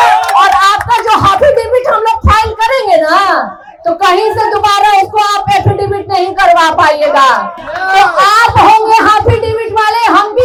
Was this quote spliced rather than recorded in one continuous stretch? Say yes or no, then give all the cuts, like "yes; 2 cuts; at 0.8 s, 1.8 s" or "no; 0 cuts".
no; 0 cuts